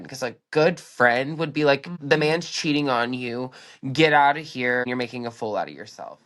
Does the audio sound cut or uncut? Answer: cut